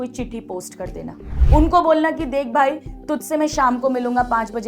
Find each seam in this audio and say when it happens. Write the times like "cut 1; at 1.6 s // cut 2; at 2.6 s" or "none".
cut 1; at 1.3 s